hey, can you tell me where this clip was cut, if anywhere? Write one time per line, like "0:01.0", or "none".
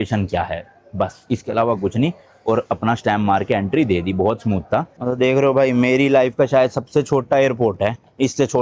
0:05.0